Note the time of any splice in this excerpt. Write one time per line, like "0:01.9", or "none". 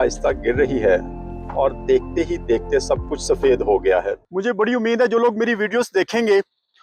0:04.2